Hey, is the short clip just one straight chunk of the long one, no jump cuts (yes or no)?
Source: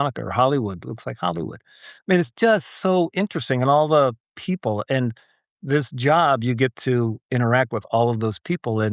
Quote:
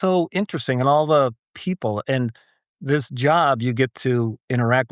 yes